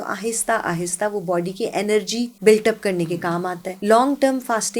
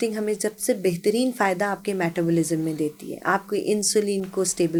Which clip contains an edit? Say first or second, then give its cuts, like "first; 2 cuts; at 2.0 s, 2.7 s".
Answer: first; 2 cuts; at 2.3 s, 3.6 s